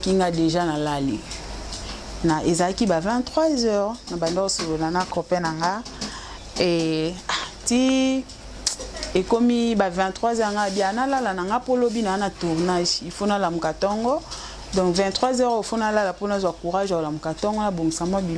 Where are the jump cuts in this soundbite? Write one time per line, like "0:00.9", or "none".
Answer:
none

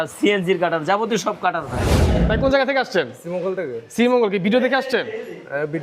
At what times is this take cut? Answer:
0:02.1

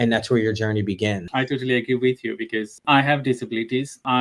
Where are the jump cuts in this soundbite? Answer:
0:01.2
0:02.7

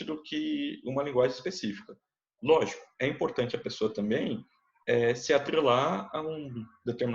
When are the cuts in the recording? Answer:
none

